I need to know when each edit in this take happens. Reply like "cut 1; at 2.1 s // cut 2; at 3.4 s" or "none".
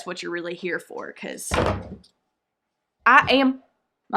cut 1; at 2.9 s